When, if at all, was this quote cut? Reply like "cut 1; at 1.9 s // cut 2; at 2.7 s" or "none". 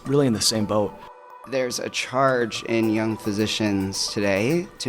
cut 1; at 1.2 s